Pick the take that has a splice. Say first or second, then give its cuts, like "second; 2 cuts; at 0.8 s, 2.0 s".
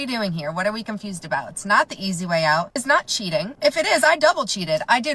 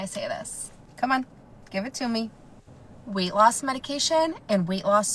first; 1 cut; at 1.5 s